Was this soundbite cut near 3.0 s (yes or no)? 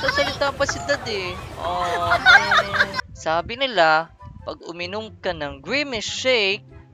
yes